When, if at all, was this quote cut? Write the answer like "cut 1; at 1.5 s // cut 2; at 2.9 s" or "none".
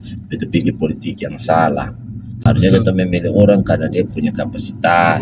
none